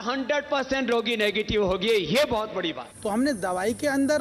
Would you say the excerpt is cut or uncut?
cut